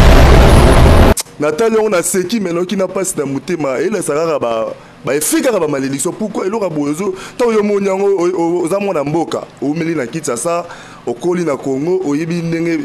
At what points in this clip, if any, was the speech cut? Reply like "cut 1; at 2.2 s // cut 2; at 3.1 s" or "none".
cut 1; at 1.2 s